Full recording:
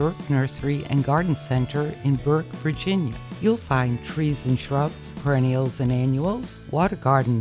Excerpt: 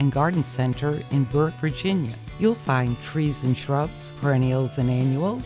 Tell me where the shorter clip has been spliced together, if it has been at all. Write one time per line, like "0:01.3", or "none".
0:01.6